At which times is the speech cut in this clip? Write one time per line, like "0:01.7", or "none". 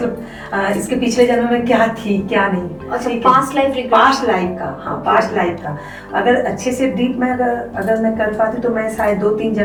none